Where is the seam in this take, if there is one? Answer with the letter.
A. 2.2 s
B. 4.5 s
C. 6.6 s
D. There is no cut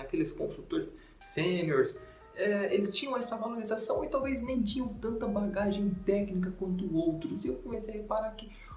A